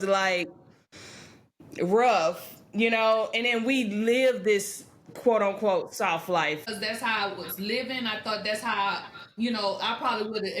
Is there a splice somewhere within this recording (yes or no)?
yes